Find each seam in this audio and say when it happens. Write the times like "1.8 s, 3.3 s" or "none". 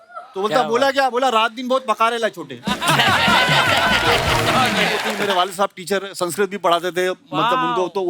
5.1 s

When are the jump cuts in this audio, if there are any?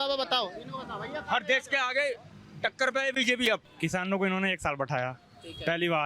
3.7 s

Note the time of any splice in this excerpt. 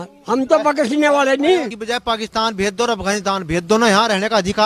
1.7 s

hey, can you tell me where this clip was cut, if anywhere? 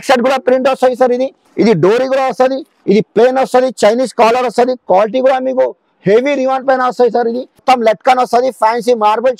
1.4 s, 2.7 s, 7.6 s

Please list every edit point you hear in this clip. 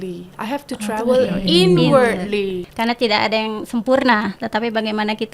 2.7 s

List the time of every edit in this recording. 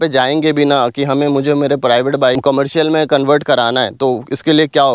2.4 s

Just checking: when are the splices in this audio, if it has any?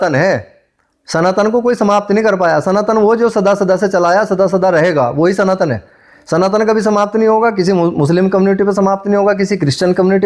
none

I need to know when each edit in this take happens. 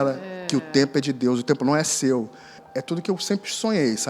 2.6 s

